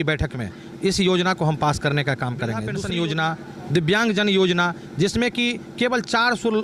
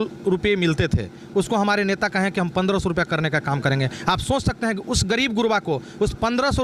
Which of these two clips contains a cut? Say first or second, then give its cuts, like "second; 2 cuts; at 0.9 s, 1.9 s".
first; 1 cut; at 2.7 s